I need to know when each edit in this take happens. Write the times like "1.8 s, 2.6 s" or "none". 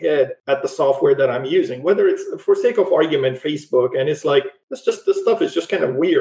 none